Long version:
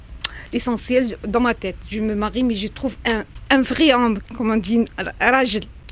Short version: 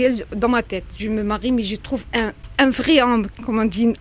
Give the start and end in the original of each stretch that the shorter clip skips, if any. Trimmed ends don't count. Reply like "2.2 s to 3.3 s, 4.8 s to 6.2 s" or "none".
none